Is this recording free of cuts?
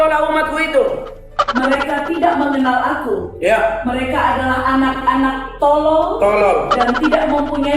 yes; 0 cuts

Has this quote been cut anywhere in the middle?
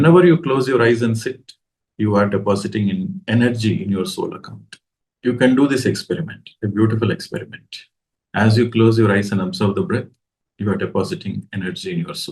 no; 0 cuts

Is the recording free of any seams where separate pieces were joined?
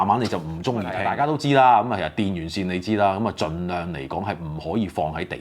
no; 1 cut; at 1.0 s

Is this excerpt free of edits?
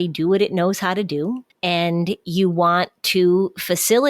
no; 1 cut; at 1.5 s

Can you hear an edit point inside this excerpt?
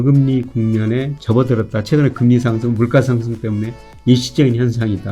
no; 0 cuts

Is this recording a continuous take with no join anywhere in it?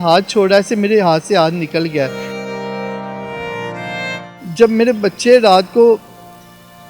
no; 2 cuts; at 2.2 s, 4.1 s

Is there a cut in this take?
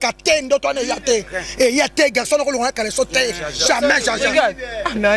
no; 0 cuts

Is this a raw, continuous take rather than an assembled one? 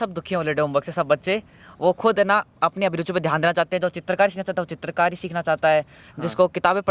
yes; 0 cuts

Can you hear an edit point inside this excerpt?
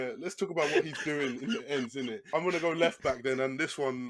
yes; 1 cut; at 2.2 s

